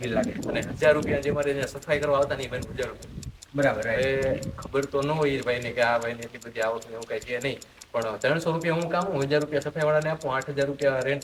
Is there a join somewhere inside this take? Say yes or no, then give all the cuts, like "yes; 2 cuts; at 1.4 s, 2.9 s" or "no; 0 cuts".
no; 0 cuts